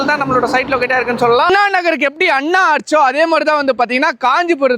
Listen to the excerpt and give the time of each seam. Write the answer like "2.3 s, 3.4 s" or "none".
1.5 s